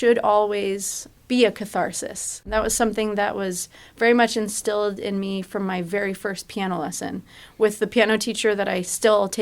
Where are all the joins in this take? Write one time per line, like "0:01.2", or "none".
0:01.0